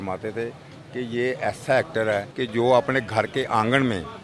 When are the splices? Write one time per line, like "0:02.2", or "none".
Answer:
0:02.4